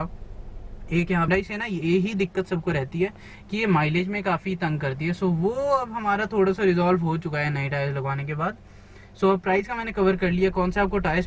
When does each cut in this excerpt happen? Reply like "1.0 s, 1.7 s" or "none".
1.3 s

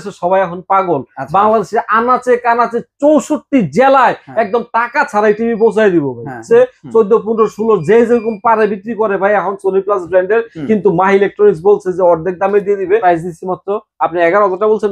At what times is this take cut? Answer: 6.4 s, 13.0 s

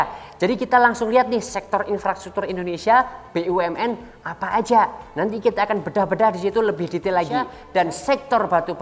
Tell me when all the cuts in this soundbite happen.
7.6 s

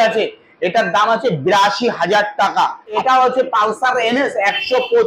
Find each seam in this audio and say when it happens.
3.0 s

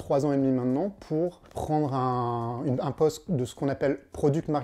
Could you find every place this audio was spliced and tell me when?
1.5 s

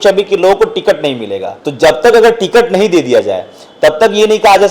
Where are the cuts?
none

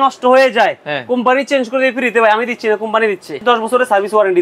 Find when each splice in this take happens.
3.4 s

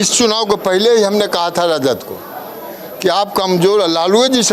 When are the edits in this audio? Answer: none

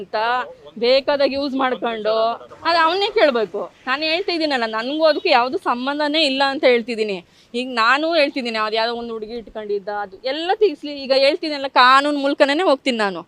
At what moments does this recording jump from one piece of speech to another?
none

